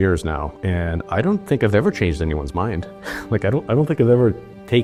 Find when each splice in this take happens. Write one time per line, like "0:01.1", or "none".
none